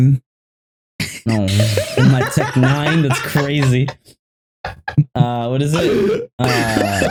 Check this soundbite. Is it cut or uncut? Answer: uncut